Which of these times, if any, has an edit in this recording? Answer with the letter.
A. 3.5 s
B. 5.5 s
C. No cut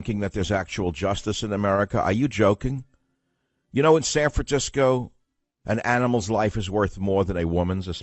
A